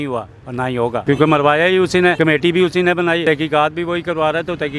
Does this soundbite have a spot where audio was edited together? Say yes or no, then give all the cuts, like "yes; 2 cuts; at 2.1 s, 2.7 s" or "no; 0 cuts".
yes; 3 cuts; at 1.0 s, 2.2 s, 3.2 s